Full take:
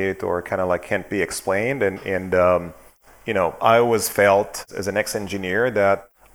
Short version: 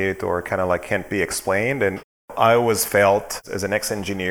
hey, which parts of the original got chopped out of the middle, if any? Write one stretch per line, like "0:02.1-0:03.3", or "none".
0:02.3-0:03.5